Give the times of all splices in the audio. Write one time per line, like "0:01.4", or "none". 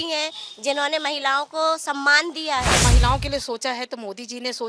0:02.8